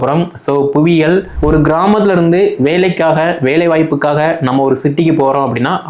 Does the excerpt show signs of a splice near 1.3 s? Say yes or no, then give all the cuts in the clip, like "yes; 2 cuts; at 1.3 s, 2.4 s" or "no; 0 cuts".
yes; 1 cut; at 1.3 s